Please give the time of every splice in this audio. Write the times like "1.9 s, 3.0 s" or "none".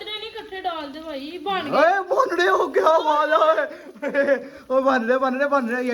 none